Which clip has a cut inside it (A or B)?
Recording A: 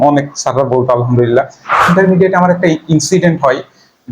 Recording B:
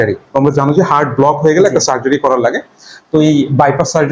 A